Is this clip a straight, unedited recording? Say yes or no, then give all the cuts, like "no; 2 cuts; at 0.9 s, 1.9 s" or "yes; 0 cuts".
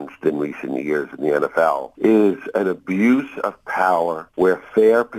no; 2 cuts; at 1.9 s, 4.2 s